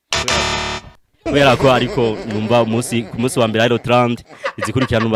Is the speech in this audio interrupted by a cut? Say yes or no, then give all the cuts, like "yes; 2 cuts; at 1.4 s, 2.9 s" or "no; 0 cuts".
no; 0 cuts